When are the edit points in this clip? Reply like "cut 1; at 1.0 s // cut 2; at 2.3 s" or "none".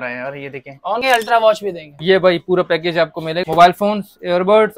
cut 1; at 1.0 s // cut 2; at 3.4 s

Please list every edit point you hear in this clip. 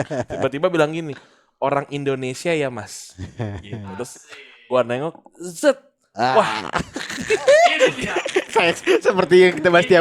none

